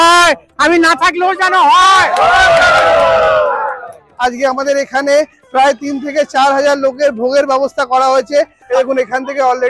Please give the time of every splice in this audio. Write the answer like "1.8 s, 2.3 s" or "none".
4.0 s, 8.6 s